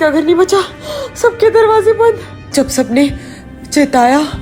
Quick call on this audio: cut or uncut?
cut